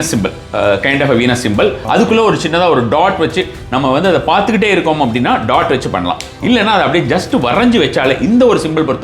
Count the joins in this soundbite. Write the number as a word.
one